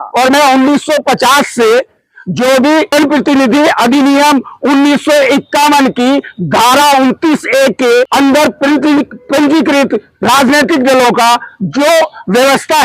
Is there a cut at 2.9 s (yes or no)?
yes